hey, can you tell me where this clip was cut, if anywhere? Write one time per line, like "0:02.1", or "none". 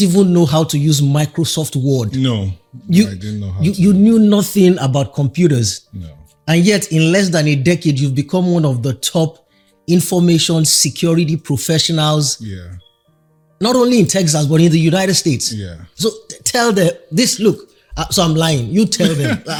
none